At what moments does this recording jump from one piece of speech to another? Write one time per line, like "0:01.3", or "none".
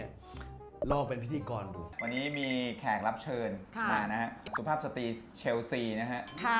0:01.9